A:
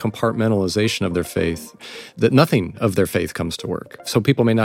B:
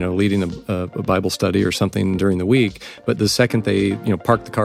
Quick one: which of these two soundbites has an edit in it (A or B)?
A